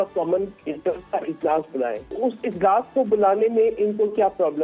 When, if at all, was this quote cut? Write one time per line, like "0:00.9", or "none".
0:02.1